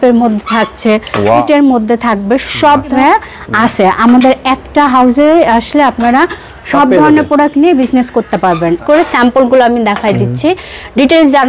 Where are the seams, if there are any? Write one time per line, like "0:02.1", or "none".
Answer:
0:01.4
0:02.9
0:08.8